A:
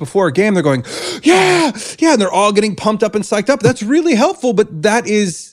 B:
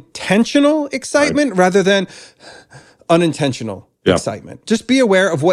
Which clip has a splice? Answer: B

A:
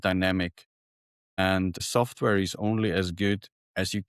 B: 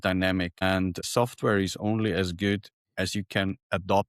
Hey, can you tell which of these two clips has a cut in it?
B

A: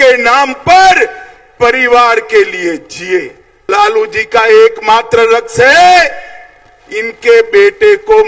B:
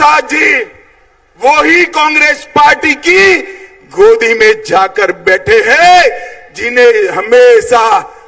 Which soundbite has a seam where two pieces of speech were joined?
A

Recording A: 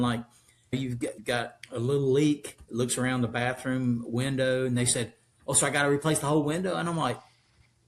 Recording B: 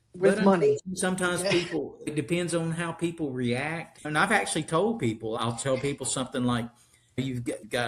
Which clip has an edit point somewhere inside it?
B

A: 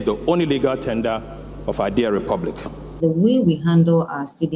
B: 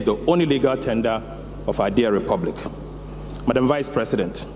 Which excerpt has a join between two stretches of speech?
A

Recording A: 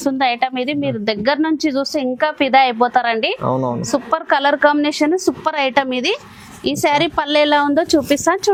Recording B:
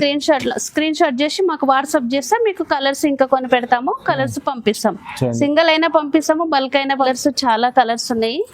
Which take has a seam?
B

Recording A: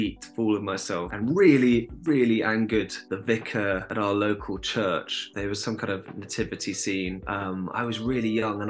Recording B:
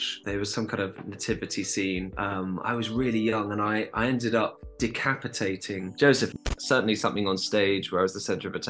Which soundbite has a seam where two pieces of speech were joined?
B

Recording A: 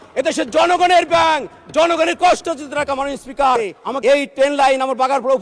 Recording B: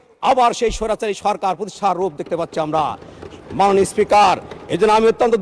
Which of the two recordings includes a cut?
A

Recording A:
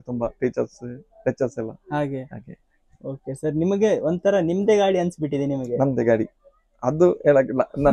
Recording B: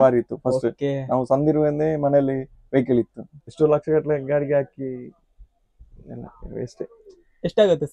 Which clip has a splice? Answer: B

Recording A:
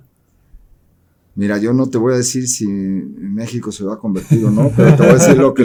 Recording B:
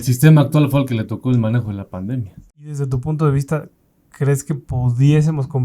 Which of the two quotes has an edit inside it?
B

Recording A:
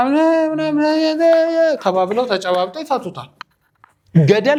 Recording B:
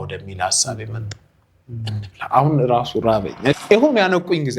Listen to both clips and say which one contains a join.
B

